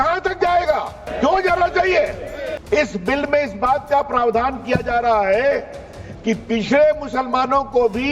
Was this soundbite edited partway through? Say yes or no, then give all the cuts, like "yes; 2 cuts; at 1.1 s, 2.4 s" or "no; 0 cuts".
yes; 2 cuts; at 1.0 s, 2.5 s